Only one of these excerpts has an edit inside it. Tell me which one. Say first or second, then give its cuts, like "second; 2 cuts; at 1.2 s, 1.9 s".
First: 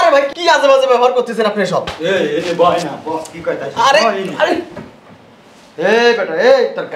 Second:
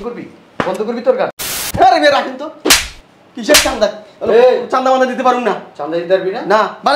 second; 1 cut; at 1.4 s